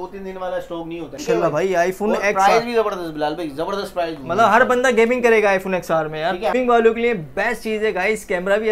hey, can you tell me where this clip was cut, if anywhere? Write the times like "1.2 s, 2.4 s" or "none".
1.1 s, 6.5 s

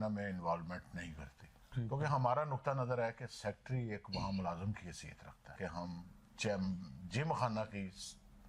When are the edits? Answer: 1.7 s, 5.6 s

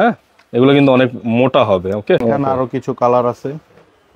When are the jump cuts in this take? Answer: 2.2 s

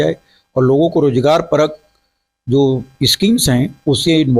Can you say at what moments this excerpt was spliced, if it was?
none

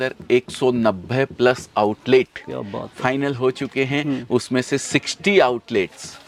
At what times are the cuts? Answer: none

